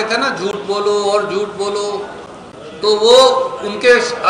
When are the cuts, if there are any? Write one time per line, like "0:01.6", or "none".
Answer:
none